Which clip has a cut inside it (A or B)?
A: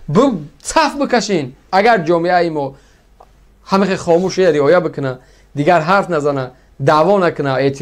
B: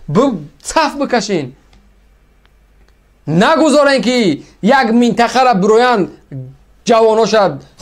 A